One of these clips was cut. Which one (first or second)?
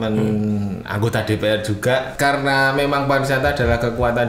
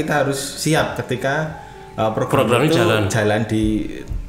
first